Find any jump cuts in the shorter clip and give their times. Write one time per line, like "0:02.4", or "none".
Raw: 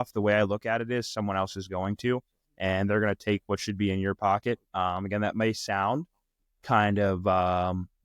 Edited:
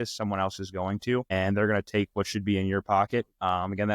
0:01.3